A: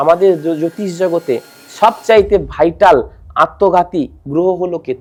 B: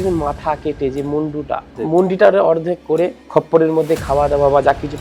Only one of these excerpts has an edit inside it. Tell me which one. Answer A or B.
B